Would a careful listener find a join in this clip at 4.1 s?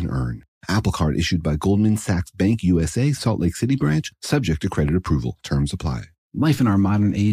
no; 1 cut; at 6.1 s

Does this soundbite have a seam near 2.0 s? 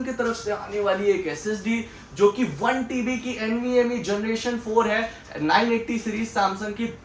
no; 0 cuts

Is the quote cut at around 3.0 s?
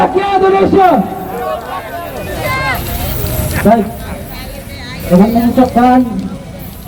no; 0 cuts

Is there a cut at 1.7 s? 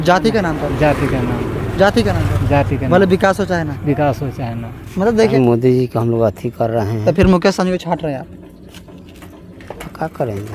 no; 1 cut; at 5.3 s

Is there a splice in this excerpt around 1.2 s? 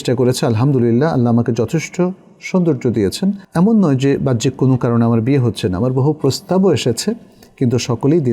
no; 1 cut; at 3.4 s

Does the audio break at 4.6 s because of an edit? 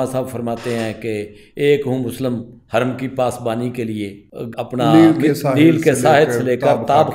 yes; 1 cut; at 4.6 s

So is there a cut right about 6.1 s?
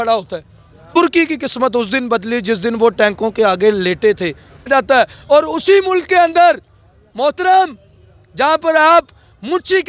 no; 2 cuts; at 1.0 s, 4.7 s

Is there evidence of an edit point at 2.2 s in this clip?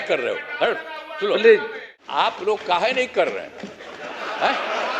yes; 1 cut; at 2.2 s

